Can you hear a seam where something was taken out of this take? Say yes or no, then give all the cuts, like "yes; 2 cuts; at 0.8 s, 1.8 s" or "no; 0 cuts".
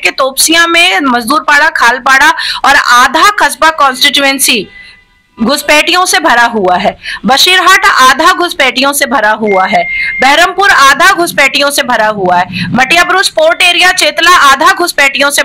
no; 0 cuts